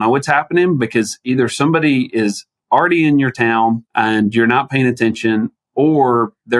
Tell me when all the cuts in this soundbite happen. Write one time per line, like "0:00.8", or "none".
0:03.9